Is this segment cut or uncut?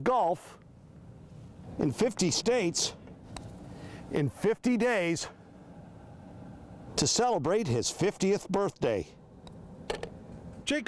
uncut